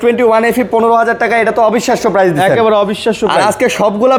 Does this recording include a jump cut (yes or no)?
no